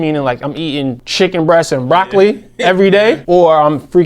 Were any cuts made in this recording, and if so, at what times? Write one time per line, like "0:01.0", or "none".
0:01.0
0:03.2